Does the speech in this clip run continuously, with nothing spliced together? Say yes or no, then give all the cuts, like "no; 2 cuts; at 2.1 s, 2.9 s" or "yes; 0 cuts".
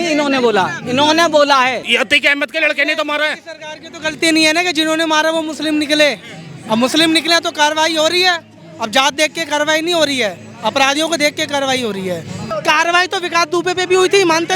no; 2 cuts; at 1.8 s, 12.4 s